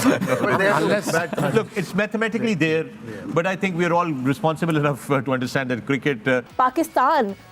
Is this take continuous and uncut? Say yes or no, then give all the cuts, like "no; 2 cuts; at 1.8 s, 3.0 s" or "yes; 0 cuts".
no; 1 cut; at 6.5 s